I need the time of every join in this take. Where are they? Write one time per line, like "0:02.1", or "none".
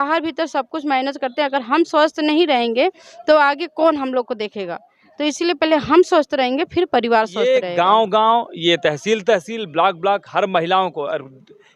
0:07.5

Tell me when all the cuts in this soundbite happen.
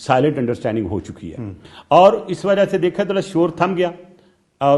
none

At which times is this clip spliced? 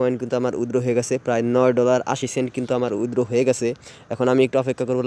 none

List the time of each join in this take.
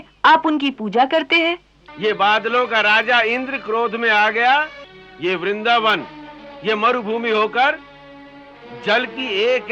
0:01.8
0:05.1

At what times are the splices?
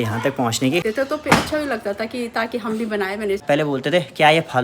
0:00.9
0:03.4

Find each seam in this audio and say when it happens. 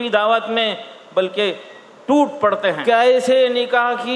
0:02.8

